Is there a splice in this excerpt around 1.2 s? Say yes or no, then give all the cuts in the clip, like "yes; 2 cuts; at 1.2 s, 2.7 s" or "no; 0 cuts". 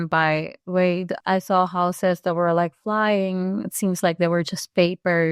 yes; 1 cut; at 1.2 s